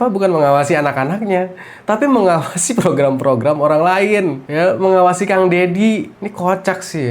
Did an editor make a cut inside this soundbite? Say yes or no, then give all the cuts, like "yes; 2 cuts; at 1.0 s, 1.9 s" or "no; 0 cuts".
yes; 1 cut; at 4.4 s